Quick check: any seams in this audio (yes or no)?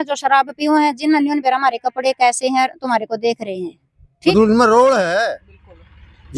yes